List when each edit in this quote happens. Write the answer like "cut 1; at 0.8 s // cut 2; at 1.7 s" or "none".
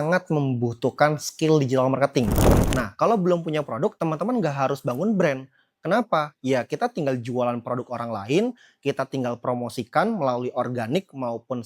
cut 1; at 2.5 s